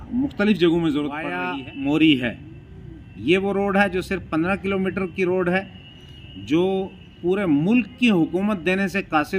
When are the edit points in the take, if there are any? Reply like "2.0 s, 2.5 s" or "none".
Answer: 1.4 s